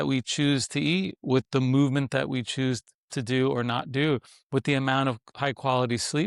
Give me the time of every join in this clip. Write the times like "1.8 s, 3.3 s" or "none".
none